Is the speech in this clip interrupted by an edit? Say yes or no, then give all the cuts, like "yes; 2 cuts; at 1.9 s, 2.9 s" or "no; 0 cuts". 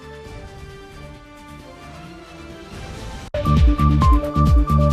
no; 0 cuts